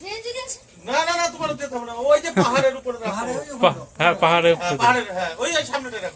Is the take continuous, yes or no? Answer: yes